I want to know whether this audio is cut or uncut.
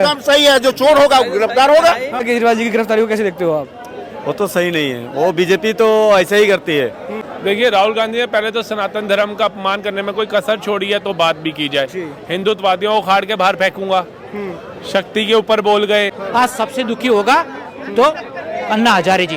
cut